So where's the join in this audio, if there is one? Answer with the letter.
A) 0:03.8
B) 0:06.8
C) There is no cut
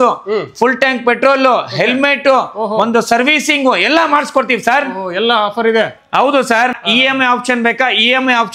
B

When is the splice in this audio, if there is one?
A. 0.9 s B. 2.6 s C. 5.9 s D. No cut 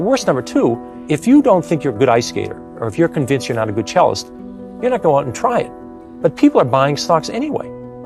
A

